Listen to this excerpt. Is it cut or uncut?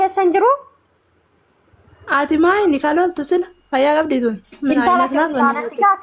uncut